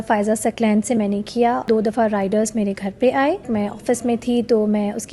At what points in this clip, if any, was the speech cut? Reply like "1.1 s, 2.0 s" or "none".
1.7 s, 3.5 s